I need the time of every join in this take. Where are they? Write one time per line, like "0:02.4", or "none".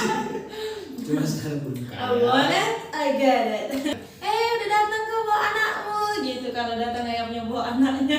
0:03.9